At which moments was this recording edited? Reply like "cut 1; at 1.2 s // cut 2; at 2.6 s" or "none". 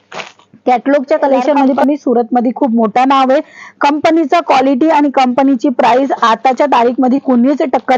cut 1; at 1.7 s